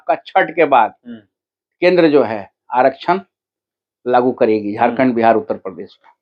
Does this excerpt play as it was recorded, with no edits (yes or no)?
yes